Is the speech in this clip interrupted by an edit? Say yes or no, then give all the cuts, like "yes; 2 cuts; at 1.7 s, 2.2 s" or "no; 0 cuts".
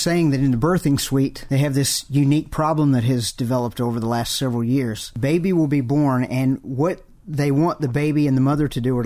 yes; 2 cuts; at 1.4 s, 5.0 s